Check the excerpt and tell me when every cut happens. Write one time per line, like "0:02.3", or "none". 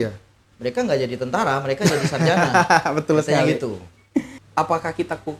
0:04.4